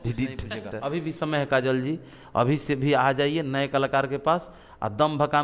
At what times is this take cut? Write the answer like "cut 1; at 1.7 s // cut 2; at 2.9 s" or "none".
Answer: cut 1; at 1.2 s